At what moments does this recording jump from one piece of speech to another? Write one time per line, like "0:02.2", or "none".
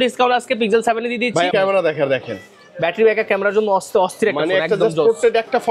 0:01.5